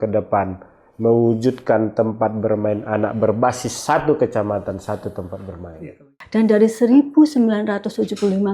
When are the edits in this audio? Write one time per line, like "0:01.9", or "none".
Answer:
0:05.8

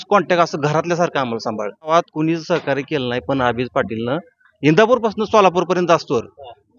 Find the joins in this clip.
0:01.9

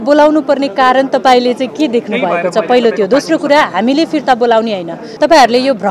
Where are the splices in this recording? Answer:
0:05.0

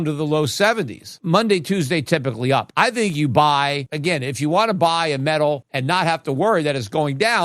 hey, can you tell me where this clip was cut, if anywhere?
0:01.0
0:02.7
0:03.9
0:05.7

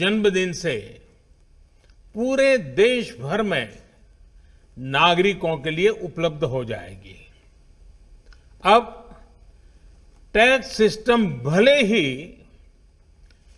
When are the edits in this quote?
0:07.5

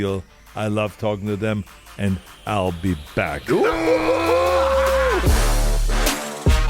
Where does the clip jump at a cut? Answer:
0:05.2

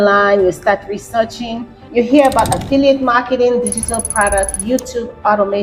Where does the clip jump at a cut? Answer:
0:01.8

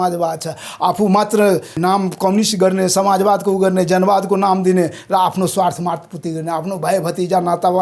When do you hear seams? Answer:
0:01.8

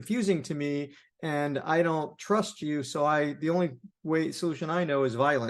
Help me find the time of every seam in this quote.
none

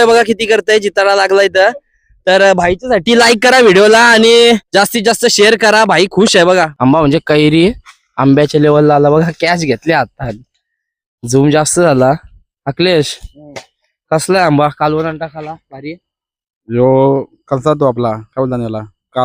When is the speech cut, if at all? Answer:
0:06.7

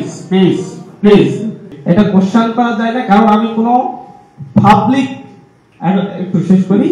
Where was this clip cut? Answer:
0:01.7

